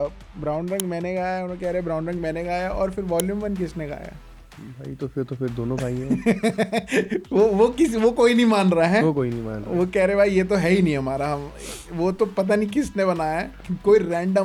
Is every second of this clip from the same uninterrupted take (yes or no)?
yes